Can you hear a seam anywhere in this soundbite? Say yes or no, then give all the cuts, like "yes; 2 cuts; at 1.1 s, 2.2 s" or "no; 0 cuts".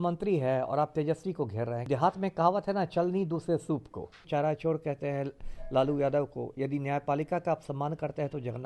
yes; 2 cuts; at 1.8 s, 4.2 s